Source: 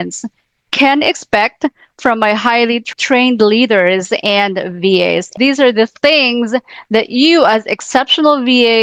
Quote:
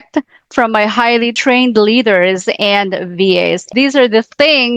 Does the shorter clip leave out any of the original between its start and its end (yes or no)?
yes